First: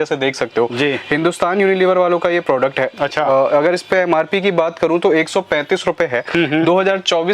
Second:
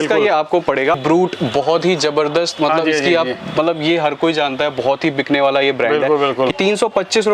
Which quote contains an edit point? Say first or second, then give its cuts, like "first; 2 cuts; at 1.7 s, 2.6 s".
second; 2 cuts; at 1.0 s, 6.5 s